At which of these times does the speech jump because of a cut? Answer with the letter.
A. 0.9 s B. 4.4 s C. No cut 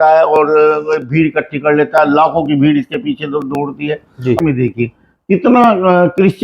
B